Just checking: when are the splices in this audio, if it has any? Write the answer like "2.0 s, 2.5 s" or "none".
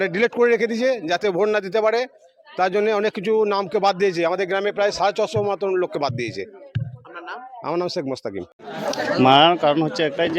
8.5 s